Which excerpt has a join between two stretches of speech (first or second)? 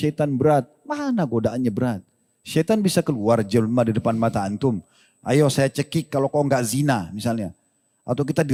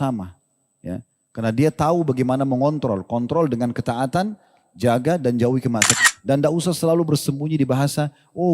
second